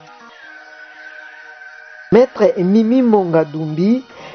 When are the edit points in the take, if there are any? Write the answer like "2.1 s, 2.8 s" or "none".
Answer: 2.0 s